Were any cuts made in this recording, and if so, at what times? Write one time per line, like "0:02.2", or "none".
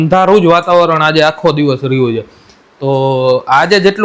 none